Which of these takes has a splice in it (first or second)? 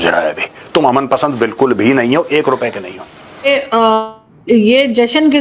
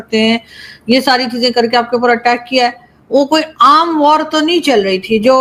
first